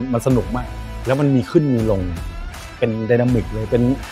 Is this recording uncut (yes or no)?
yes